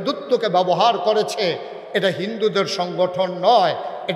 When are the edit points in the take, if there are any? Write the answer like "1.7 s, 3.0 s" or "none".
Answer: none